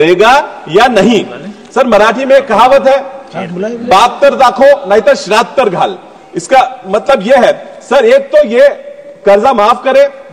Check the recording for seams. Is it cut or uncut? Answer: uncut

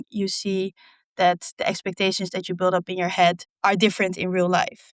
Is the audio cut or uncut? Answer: cut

